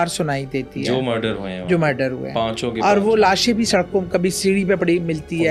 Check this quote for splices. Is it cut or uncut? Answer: uncut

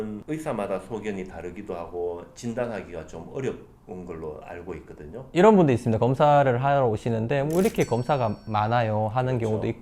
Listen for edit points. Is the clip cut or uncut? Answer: cut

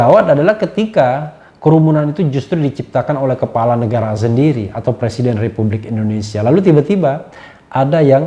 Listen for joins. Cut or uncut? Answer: uncut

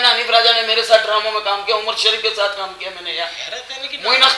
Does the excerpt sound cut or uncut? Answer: uncut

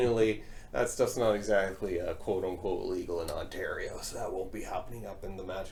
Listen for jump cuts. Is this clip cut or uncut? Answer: uncut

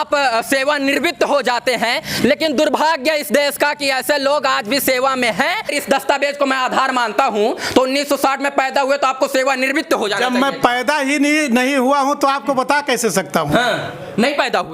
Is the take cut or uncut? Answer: cut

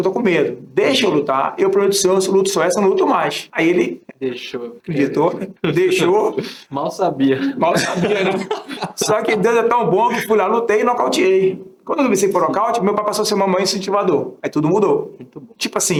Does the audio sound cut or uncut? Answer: uncut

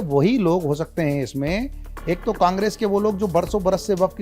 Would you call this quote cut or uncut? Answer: uncut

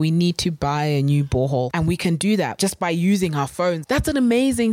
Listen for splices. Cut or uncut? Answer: cut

